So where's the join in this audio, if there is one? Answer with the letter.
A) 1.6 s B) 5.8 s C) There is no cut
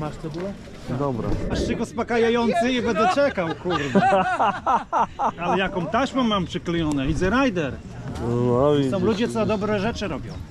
A